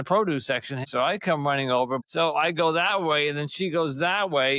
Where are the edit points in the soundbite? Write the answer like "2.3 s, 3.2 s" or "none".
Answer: 0.9 s, 2.0 s